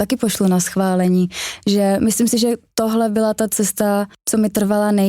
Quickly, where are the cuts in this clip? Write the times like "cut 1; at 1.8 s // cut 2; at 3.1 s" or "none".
cut 1; at 4.2 s